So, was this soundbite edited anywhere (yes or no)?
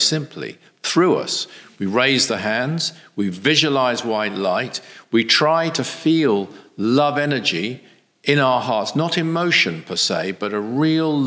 no